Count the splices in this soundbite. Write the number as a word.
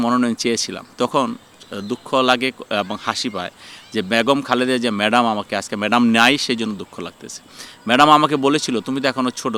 zero